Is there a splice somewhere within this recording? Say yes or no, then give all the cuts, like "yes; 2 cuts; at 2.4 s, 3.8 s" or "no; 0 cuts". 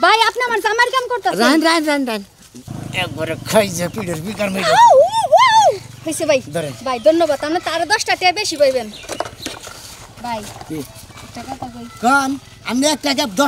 no; 0 cuts